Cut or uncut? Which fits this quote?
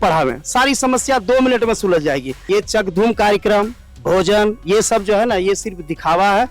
cut